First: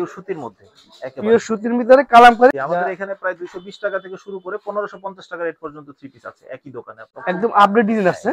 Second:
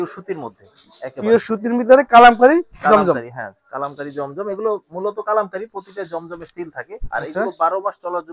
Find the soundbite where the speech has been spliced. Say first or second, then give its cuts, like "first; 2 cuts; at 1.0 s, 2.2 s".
first; 2 cuts; at 2.5 s, 7.0 s